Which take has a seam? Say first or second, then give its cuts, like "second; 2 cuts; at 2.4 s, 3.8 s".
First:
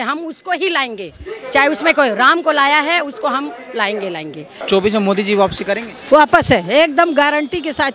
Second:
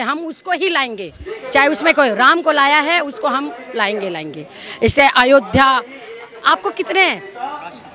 first; 1 cut; at 4.6 s